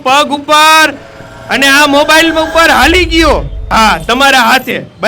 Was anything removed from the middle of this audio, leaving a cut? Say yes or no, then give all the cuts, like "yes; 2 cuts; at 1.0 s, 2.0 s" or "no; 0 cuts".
yes; 1 cut; at 3.6 s